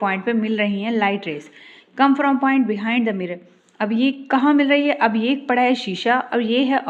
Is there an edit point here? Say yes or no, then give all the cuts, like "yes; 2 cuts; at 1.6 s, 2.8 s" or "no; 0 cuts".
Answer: no; 0 cuts